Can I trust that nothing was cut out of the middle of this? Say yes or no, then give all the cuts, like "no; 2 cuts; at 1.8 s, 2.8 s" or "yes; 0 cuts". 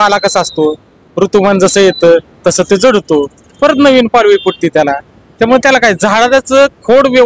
yes; 0 cuts